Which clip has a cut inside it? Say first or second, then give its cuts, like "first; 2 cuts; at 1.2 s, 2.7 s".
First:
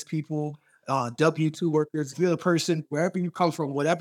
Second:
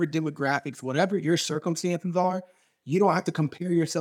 first; 1 cut; at 2.1 s